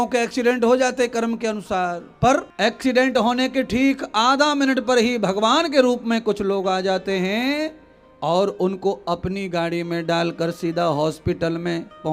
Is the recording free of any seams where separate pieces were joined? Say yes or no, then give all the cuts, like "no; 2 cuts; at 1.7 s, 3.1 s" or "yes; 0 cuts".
no; 1 cut; at 2.5 s